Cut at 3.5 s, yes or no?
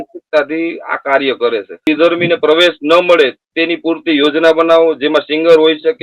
no